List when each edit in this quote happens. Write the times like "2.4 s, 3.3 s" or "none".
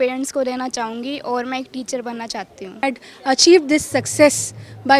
2.8 s